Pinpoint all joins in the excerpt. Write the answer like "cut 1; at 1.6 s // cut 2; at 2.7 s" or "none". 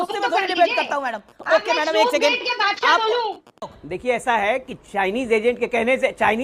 cut 1; at 3.7 s